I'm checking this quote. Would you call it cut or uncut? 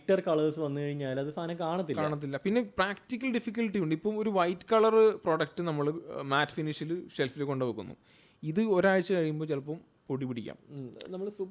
uncut